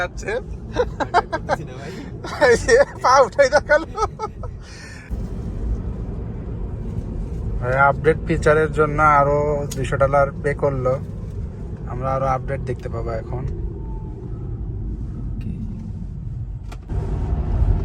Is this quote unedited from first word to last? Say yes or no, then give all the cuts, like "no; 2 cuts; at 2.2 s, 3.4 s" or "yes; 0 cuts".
no; 2 cuts; at 5.1 s, 16.9 s